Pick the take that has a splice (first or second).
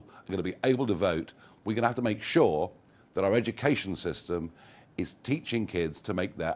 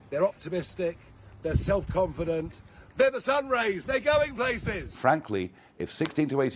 second